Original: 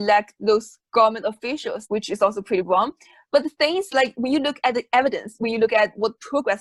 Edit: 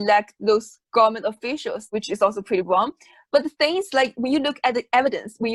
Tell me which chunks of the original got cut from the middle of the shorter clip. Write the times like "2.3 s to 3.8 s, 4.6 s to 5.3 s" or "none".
none